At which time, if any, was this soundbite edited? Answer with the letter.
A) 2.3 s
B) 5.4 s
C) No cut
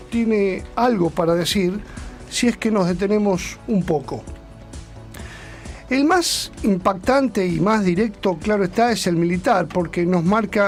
C